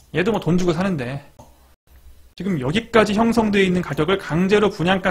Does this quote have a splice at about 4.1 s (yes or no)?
no